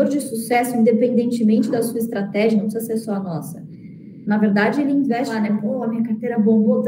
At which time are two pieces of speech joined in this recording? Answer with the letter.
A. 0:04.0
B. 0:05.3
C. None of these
B